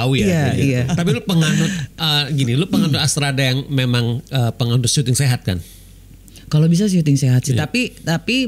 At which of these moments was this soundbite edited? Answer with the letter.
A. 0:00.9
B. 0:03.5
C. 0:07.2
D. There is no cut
A